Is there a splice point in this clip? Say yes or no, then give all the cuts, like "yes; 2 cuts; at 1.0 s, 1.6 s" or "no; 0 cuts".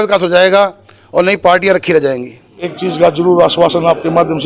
yes; 1 cut; at 2.6 s